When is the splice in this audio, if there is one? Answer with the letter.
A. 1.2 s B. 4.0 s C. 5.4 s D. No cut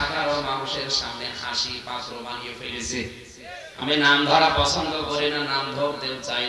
B